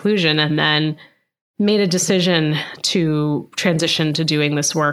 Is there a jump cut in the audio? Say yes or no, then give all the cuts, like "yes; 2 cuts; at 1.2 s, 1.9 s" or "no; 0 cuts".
no; 0 cuts